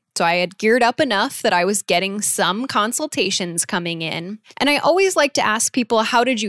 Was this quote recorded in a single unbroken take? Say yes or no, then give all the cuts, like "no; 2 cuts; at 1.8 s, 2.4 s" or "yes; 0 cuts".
no; 1 cut; at 4.4 s